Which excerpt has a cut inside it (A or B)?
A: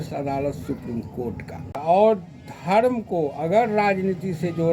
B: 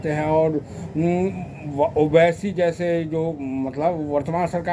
A